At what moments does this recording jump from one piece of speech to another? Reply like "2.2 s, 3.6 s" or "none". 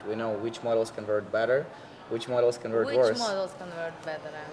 none